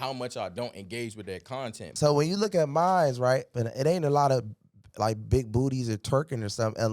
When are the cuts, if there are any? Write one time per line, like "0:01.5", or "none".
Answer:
0:01.8
0:03.5